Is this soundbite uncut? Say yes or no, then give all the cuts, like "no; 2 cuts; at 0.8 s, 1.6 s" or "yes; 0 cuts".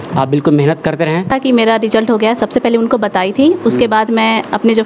no; 1 cut; at 1.3 s